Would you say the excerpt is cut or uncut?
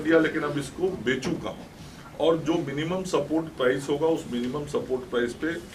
uncut